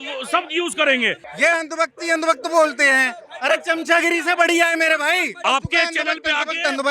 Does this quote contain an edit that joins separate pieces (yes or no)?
yes